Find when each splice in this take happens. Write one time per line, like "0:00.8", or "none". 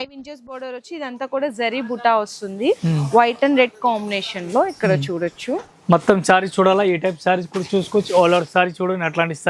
none